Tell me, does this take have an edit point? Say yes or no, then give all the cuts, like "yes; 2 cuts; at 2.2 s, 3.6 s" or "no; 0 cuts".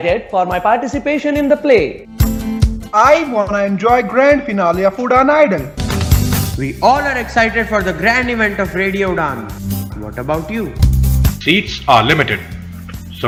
no; 0 cuts